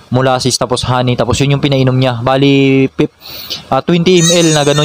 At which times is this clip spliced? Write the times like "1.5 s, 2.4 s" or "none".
none